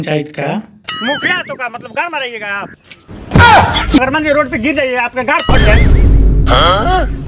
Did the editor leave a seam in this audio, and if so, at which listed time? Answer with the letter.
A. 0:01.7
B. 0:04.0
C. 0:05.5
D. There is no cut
B